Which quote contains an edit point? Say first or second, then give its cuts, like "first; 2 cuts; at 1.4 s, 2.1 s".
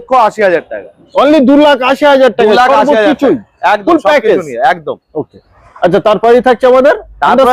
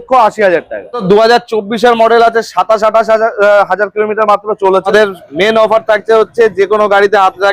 second; 2 cuts; at 1.0 s, 4.9 s